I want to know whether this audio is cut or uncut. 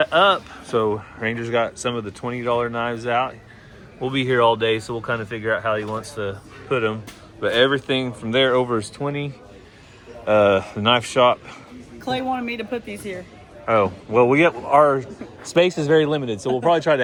uncut